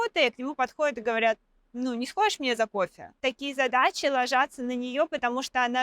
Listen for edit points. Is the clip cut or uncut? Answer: cut